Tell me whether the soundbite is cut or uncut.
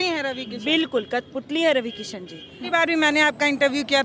cut